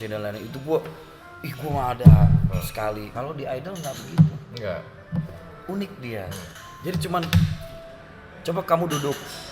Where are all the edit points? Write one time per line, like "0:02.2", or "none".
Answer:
0:03.1
0:06.5